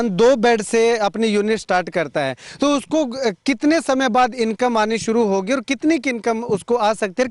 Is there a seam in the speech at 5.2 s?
no; 0 cuts

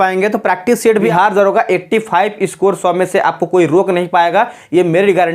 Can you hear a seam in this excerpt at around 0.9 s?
yes; 1 cut; at 0.9 s

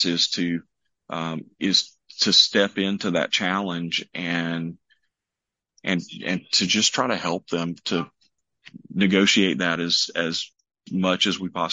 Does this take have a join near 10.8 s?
yes; 1 cut; at 10.8 s

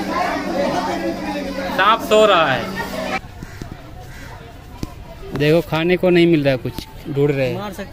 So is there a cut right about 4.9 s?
no; 1 cut; at 3.2 s

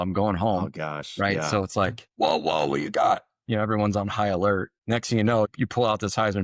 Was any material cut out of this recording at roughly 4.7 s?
yes; 3 cuts; at 2.0 s, 4.7 s, 5.5 s

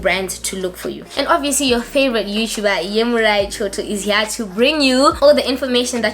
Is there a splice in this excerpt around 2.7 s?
no; 1 cut; at 1.0 s

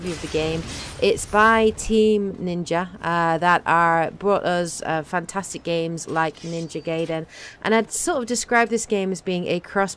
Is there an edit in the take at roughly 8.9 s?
no; 1 cut; at 6.2 s

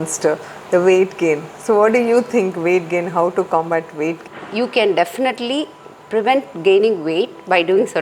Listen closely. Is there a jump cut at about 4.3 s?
yes; 1 cut; at 4.3 s

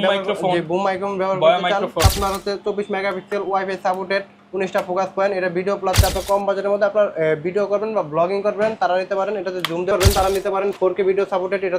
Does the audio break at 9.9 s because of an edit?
yes; 3 cuts; at 2.1 s, 6.0 s, 9.9 s

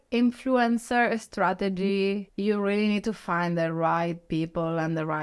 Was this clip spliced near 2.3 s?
yes; 1 cut; at 2.3 s

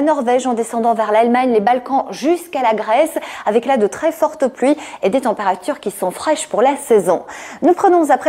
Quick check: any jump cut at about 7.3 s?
no; 0 cuts

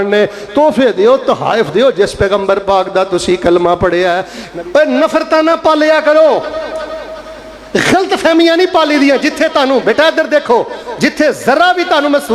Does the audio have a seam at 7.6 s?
no; 1 cut; at 4.4 s

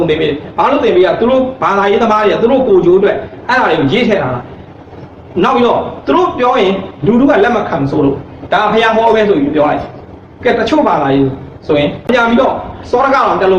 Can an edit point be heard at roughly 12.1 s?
yes; 1 cut; at 12.1 s

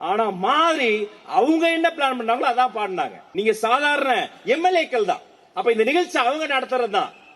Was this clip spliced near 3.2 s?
yes; 1 cut; at 3.2 s

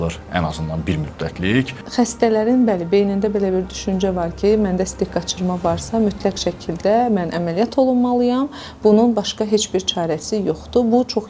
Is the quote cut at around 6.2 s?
no; 1 cut; at 1.8 s

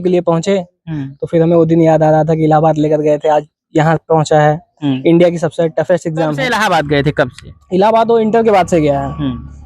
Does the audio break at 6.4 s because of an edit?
yes; 1 cut; at 6.4 s

